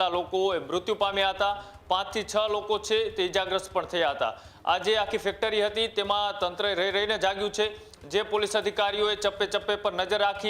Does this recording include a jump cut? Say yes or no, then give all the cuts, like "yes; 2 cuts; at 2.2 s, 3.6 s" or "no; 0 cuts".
no; 0 cuts